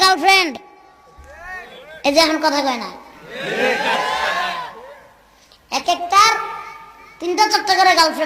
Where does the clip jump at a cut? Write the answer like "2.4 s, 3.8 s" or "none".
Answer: none